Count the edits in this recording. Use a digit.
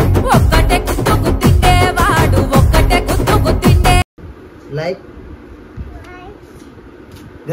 1